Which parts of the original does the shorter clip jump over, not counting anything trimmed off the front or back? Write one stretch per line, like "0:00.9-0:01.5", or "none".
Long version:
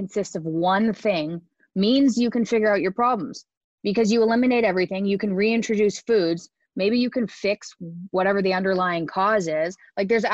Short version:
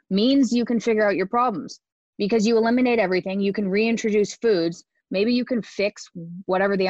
none